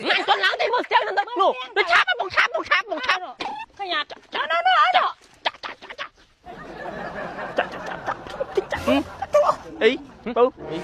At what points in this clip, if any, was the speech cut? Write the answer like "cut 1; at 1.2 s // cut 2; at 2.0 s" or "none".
none